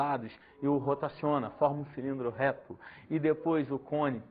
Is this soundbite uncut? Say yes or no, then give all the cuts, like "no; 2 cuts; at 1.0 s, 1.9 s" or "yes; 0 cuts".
no; 1 cut; at 2.6 s